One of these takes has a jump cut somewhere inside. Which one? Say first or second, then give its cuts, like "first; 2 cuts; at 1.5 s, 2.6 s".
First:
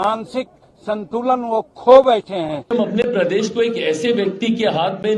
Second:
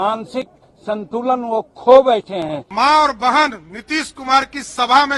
first; 1 cut; at 2.7 s